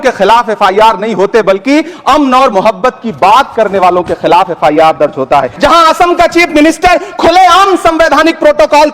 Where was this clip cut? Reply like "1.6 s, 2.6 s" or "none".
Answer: 5.5 s

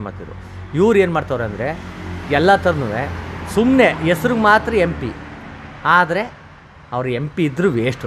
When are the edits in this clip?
none

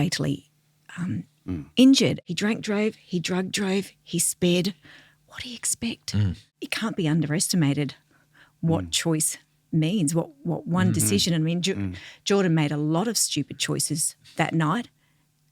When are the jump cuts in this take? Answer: 2.2 s, 6.5 s, 14.2 s

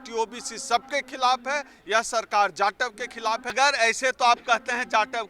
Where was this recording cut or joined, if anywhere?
3.5 s

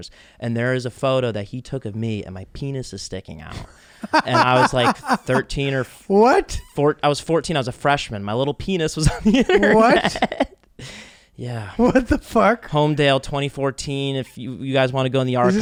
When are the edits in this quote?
none

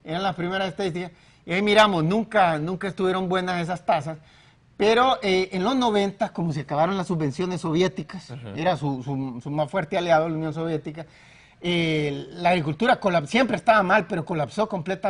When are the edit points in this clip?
8.1 s

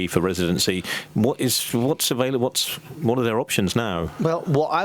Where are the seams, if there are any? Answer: none

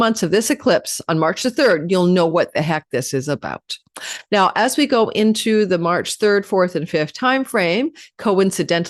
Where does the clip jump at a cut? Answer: none

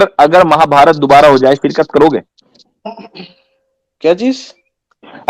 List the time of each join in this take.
none

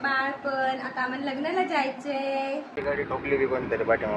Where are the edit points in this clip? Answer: 2.7 s

